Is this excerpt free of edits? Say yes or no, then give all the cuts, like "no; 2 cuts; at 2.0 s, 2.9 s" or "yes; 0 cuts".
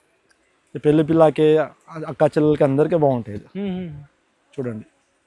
yes; 0 cuts